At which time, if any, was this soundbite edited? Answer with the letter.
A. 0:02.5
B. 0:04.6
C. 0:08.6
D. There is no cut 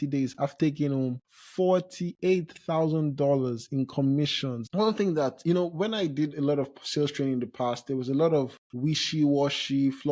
B